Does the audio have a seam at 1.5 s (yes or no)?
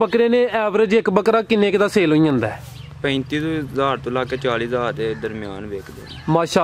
no